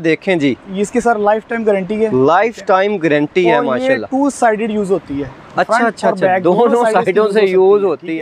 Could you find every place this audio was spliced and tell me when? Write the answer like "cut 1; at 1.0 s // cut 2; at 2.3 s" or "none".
none